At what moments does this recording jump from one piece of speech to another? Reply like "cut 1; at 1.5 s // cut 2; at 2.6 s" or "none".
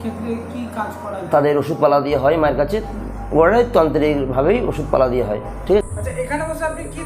cut 1; at 5.8 s